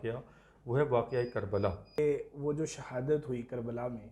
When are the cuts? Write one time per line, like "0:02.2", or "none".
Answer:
0:02.0